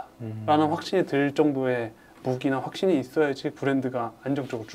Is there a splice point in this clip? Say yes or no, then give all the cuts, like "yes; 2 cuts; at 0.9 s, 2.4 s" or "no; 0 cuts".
no; 0 cuts